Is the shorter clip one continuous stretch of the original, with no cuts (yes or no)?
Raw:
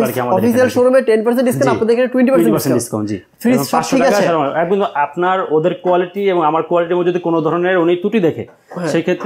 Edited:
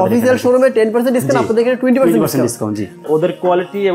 no